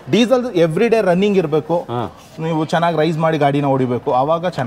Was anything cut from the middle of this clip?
no; 0 cuts

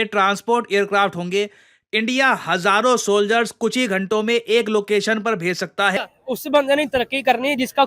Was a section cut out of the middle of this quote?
yes; 1 cut; at 6.0 s

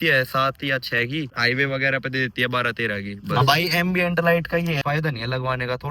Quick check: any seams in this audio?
yes; 3 cuts; at 1.3 s, 3.2 s, 4.8 s

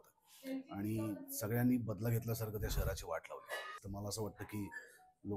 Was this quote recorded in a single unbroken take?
no; 1 cut; at 3.8 s

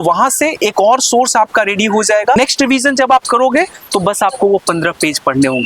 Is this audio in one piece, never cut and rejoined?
no; 1 cut; at 2.4 s

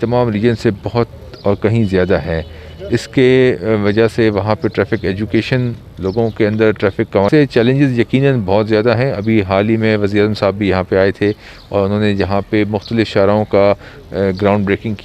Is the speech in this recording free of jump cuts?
no; 1 cut; at 7.3 s

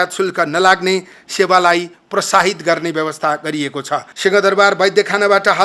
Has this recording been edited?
yes; 1 cut; at 4.1 s

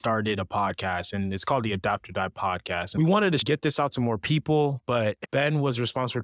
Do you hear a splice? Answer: yes; 3 cuts; at 2.9 s, 3.4 s, 5.2 s

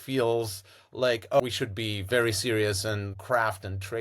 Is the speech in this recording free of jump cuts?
no; 2 cuts; at 1.4 s, 3.2 s

